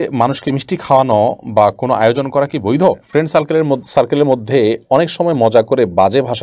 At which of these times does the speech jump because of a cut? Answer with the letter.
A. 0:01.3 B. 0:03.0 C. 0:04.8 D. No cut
B